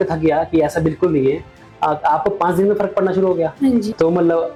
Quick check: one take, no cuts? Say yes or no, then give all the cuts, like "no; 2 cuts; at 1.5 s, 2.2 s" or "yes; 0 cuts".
yes; 0 cuts